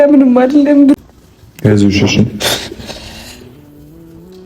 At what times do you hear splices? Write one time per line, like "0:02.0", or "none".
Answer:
0:01.0